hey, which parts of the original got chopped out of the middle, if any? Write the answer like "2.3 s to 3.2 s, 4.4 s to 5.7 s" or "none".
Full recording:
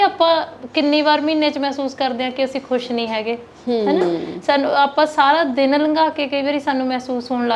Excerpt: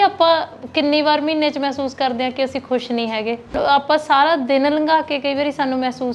3.6 s to 4.6 s